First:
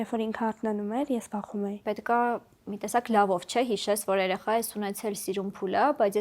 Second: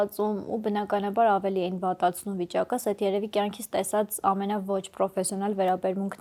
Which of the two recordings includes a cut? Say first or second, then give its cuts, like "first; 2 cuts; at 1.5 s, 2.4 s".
first; 1 cut; at 1.8 s